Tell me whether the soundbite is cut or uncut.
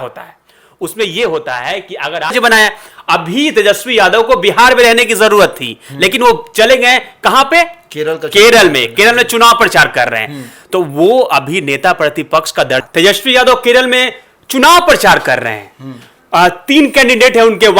cut